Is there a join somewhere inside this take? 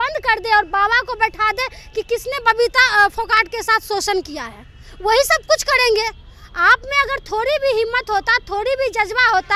no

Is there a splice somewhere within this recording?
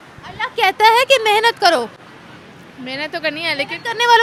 no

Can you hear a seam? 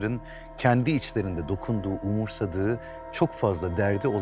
no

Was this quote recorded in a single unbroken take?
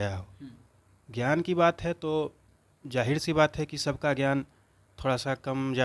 yes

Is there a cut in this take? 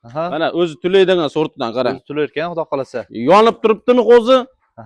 no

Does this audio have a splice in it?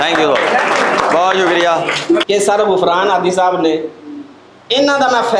yes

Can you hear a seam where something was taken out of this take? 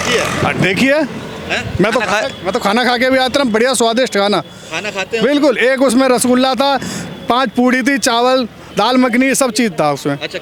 no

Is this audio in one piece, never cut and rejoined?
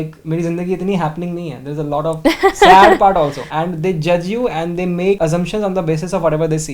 yes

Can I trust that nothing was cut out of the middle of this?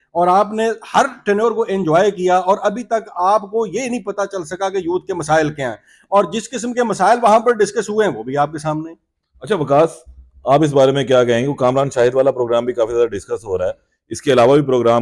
yes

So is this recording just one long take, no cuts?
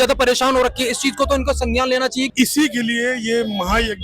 no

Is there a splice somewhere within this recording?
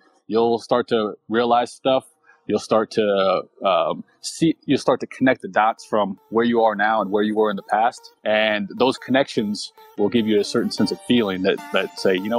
no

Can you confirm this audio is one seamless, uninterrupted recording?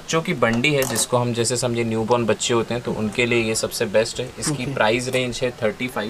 yes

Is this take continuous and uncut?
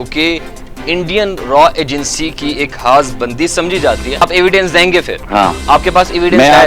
no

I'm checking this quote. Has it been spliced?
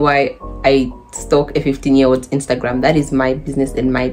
no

